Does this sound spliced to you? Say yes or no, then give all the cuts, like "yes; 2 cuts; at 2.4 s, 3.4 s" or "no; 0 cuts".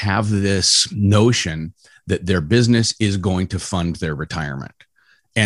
no; 0 cuts